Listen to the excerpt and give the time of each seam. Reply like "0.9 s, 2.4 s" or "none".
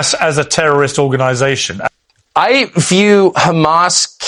none